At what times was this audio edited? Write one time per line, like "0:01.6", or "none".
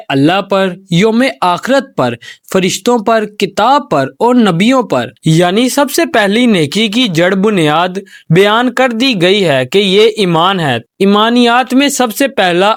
none